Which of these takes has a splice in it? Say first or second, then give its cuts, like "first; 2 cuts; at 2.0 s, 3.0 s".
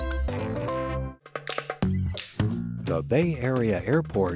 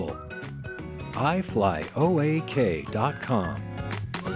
first; 1 cut; at 1.2 s